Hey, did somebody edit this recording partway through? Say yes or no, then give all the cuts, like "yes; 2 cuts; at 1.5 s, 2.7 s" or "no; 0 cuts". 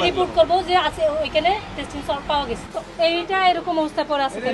yes; 1 cut; at 2.7 s